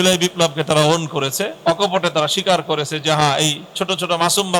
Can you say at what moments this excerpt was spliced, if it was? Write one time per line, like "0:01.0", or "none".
0:01.5